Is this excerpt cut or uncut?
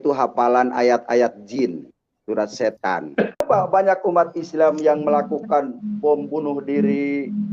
cut